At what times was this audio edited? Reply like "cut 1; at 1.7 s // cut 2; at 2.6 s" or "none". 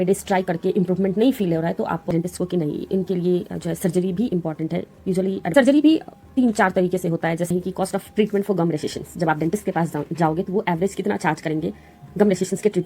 cut 1; at 2.1 s // cut 2; at 5.5 s // cut 3; at 7.5 s